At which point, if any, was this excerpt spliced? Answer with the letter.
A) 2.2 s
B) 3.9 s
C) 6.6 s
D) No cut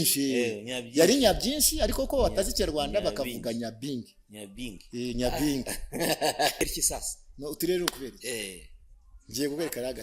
C